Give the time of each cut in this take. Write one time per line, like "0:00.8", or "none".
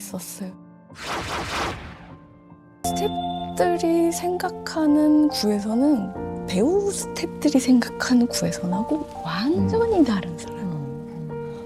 0:02.8